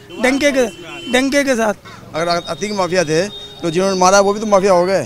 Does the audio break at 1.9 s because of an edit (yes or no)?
yes